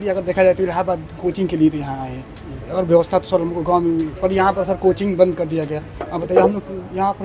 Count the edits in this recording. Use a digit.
0